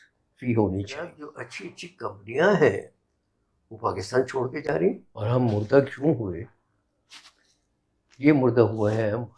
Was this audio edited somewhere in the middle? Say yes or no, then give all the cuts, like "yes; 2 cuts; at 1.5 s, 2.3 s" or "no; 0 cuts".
yes; 2 cuts; at 1.3 s, 5.1 s